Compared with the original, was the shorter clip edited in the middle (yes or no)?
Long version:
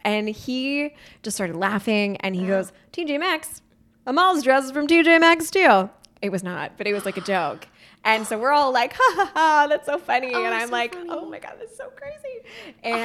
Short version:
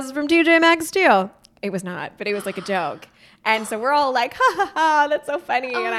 no